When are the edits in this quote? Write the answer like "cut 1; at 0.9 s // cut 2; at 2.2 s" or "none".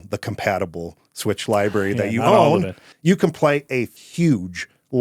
cut 1; at 2.9 s // cut 2; at 3.9 s